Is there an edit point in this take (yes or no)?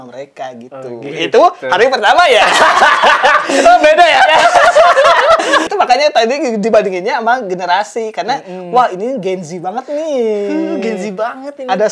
yes